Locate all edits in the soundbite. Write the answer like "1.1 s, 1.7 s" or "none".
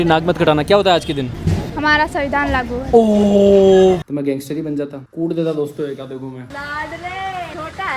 4.1 s, 6.5 s